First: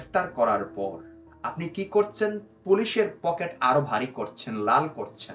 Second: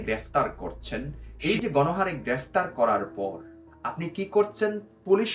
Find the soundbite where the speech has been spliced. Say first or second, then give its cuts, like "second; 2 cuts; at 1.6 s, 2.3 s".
second; 1 cut; at 1.2 s